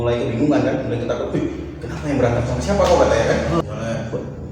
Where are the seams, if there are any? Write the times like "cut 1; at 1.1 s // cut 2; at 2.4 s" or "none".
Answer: cut 1; at 3.6 s

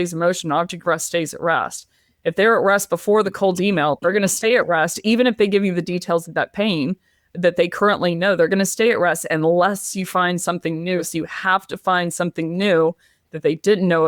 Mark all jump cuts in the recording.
cut 1; at 3.3 s // cut 2; at 11.1 s

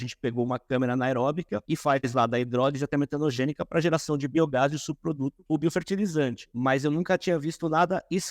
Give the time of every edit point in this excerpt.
cut 1; at 1.8 s // cut 2; at 5.4 s // cut 3; at 6.4 s

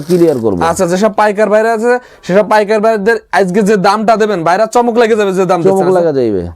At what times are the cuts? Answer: none

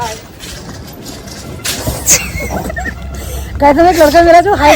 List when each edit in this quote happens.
none

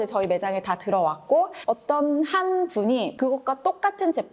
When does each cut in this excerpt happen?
cut 1; at 1.6 s // cut 2; at 3.1 s

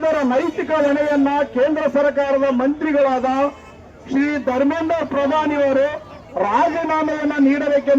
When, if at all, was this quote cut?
cut 1; at 2.1 s

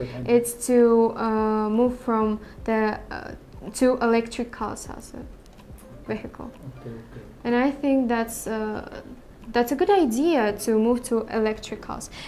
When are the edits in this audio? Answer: none

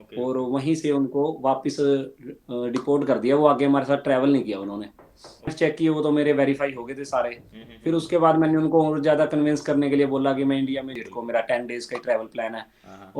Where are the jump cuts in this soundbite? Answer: cut 1; at 5.5 s // cut 2; at 10.9 s

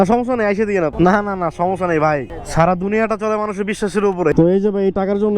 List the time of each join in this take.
cut 1; at 0.9 s // cut 2; at 4.3 s

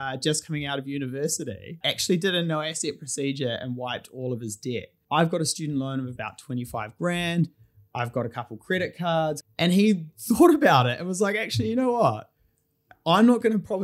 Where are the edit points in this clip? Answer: cut 1; at 1.8 s // cut 2; at 4.9 s // cut 3; at 9.4 s

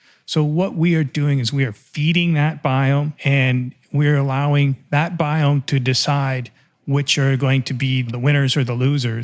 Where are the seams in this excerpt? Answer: cut 1; at 3.2 s // cut 2; at 8.1 s

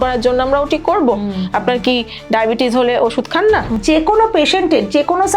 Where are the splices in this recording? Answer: cut 1; at 3.7 s

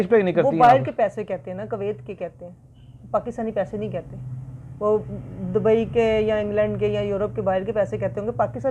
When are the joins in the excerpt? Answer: none

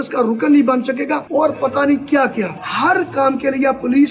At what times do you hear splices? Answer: none

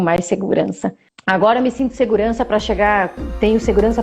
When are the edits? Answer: cut 1; at 1.1 s

